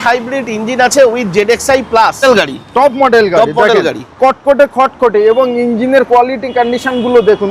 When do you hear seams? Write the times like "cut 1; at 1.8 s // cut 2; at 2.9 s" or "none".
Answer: cut 1; at 2.2 s